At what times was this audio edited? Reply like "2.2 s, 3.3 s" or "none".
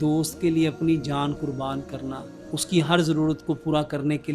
none